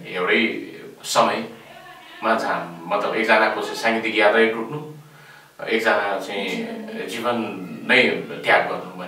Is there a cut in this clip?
no; 0 cuts

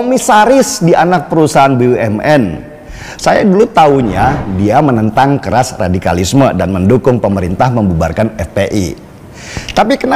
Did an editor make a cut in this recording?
no; 0 cuts

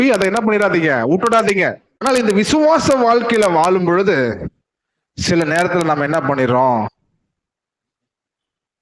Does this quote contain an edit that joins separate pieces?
yes; 1 cut; at 1.9 s

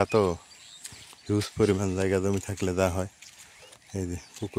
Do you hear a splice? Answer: no; 0 cuts

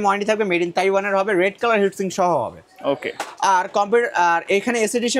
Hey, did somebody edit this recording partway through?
no; 0 cuts

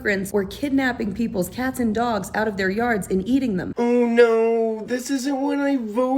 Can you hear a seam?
yes; 1 cut; at 3.7 s

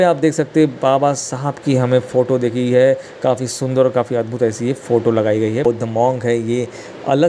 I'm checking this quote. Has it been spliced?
yes; 1 cut; at 5.6 s

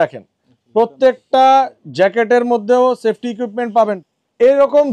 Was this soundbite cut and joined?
yes; 1 cut; at 4.0 s

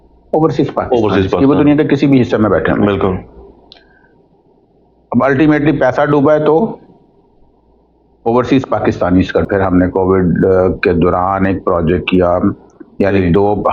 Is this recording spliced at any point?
yes; 1 cut; at 9.5 s

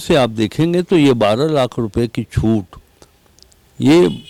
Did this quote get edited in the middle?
no; 0 cuts

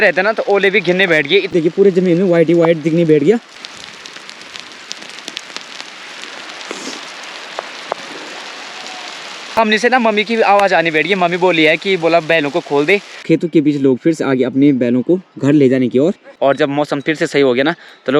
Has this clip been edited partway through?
yes; 5 cuts; at 1.5 s, 3.6 s, 9.6 s, 13.2 s, 16.3 s

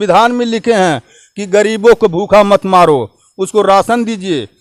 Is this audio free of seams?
yes; 0 cuts

